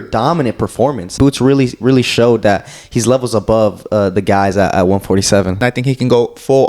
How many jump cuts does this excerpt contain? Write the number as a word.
two